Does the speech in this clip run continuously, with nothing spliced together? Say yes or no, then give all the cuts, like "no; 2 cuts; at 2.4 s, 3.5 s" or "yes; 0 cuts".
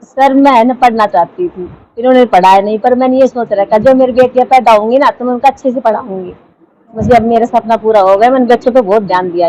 yes; 0 cuts